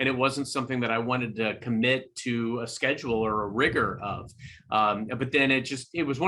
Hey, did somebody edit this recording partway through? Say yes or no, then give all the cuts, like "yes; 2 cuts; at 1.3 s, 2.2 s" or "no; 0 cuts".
no; 0 cuts